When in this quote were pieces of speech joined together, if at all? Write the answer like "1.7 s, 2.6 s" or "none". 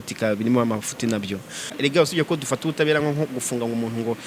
1.7 s